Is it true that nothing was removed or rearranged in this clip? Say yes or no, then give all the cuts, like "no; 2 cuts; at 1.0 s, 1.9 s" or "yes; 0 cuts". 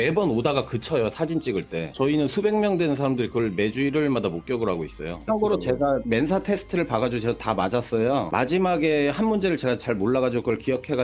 no; 3 cuts; at 1.9 s, 5.2 s, 8.3 s